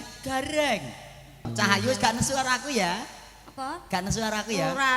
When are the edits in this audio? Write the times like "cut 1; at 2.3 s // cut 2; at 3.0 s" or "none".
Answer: cut 1; at 1.5 s